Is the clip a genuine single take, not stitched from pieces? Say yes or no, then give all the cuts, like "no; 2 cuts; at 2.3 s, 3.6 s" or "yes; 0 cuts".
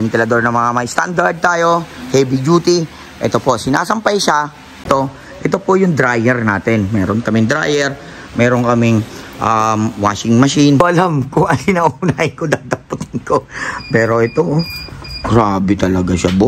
no; 2 cuts; at 4.9 s, 10.8 s